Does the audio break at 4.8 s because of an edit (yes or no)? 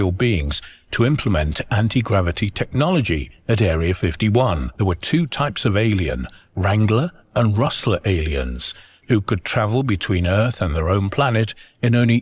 yes